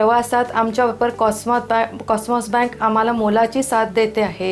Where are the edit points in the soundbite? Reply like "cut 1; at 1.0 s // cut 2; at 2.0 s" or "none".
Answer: none